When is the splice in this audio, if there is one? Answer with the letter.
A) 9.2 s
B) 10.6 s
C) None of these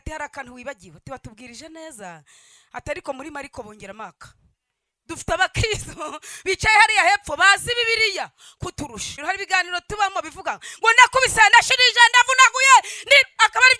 A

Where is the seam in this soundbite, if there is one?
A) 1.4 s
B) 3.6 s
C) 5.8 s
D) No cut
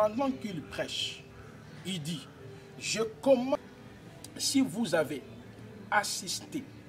B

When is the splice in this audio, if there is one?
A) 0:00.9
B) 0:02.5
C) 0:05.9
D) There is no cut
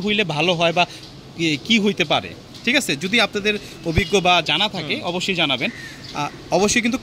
D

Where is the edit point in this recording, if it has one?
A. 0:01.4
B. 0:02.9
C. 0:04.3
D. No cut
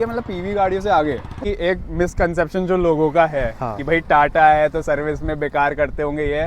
A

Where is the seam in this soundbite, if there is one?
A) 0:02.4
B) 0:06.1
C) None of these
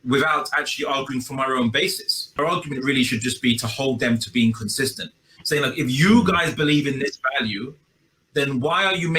A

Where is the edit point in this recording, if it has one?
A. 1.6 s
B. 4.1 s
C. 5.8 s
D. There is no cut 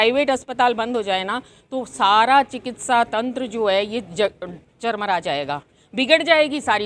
D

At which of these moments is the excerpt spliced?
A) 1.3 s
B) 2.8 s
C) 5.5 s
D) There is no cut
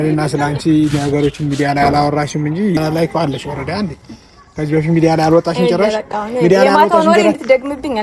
B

